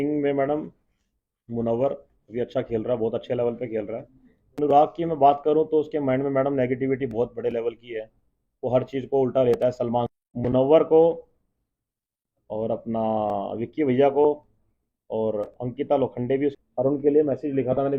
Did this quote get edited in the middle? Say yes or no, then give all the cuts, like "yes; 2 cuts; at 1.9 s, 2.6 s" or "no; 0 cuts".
yes; 3 cuts; at 4.6 s, 10.1 s, 16.6 s